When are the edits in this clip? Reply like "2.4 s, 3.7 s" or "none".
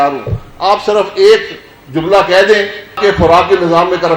3.0 s